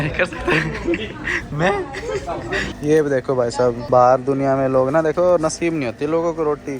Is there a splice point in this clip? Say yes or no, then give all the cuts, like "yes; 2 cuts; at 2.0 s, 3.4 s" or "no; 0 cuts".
yes; 2 cuts; at 2.7 s, 3.8 s